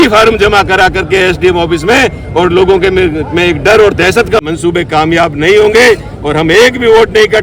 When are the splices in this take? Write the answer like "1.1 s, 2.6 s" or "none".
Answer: 4.4 s